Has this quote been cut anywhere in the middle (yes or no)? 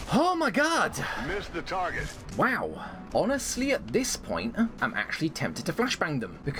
no